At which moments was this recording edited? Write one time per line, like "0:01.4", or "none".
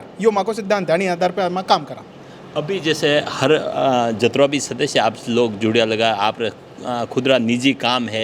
none

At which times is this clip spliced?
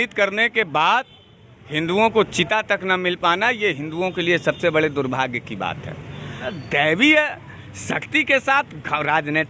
0:06.5

